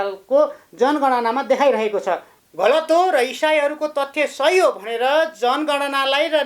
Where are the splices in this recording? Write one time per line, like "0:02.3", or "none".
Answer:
0:02.3